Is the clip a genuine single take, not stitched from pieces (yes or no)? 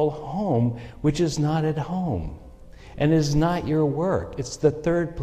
yes